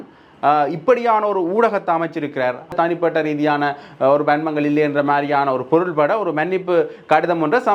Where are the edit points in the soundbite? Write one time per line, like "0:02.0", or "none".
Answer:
0:02.7

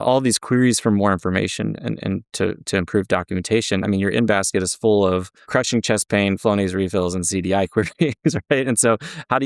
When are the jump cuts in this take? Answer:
0:05.4

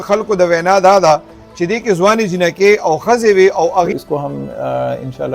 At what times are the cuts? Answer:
0:03.9

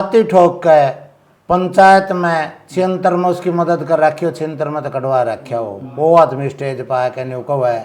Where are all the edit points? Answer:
none

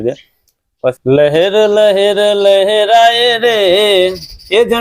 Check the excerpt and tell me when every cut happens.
0:01.0

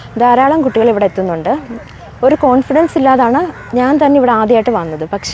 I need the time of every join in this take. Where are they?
none

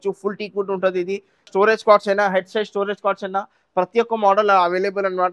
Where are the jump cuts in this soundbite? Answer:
0:01.5

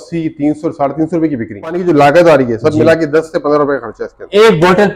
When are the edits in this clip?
0:01.8

